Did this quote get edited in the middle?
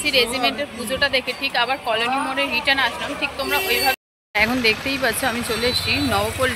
yes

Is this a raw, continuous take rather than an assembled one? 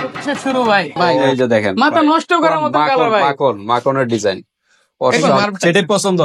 no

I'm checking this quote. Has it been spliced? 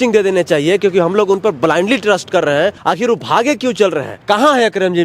yes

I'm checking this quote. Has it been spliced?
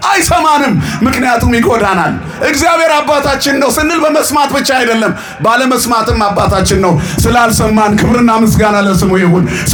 no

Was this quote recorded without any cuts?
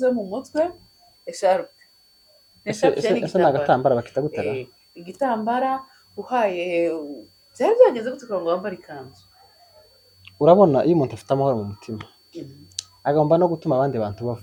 yes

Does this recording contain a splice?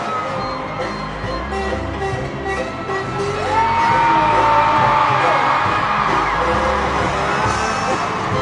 no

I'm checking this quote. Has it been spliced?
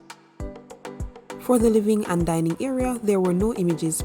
no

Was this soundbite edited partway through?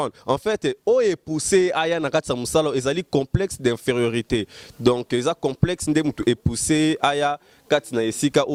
no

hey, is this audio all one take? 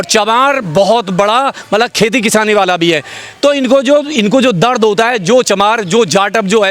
yes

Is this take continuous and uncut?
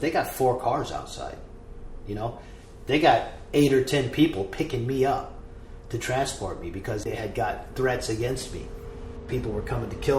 no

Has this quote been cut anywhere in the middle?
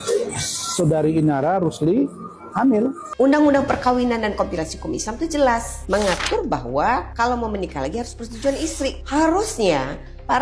yes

